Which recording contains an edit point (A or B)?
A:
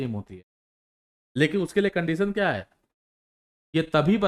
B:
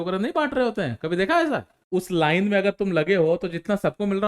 B